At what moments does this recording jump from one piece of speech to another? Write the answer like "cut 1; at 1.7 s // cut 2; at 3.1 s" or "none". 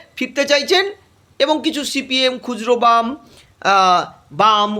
none

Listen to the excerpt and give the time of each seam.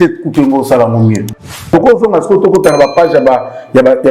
cut 1; at 1.4 s

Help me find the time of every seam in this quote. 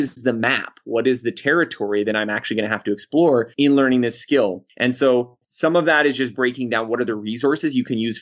cut 1; at 3.5 s

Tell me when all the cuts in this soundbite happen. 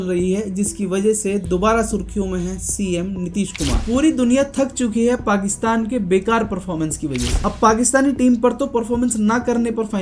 cut 1; at 3.7 s // cut 2; at 7.3 s

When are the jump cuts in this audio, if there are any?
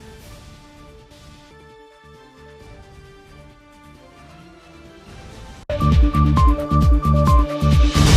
none

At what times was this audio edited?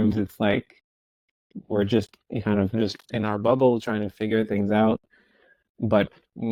none

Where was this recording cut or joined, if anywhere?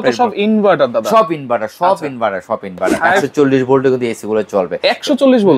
cut 1; at 3.3 s

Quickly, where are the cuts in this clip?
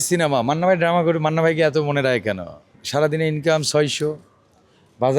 cut 1; at 2.7 s

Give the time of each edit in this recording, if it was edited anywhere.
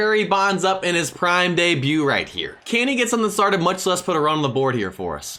none

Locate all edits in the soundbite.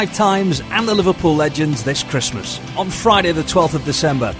none

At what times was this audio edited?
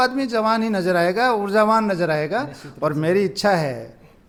none

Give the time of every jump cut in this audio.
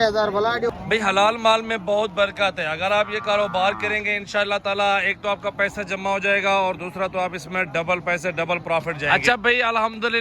cut 1; at 0.7 s // cut 2; at 9.0 s

